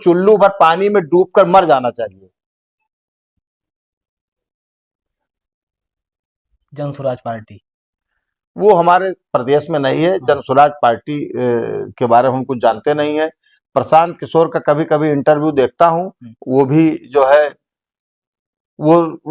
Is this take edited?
no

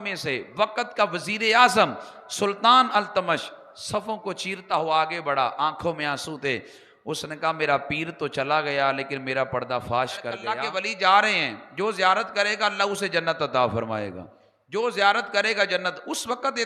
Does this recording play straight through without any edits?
no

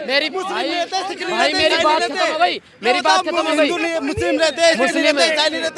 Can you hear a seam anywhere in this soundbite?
no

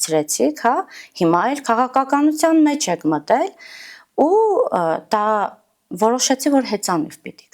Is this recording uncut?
yes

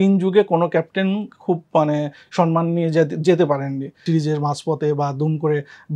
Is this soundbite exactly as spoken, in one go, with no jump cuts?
no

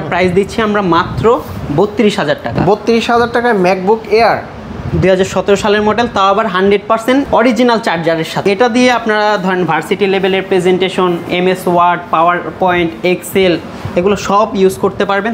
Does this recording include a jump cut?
no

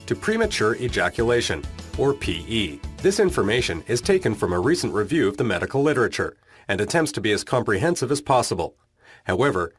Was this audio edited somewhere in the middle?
no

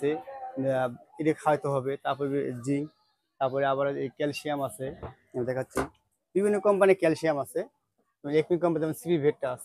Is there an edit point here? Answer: no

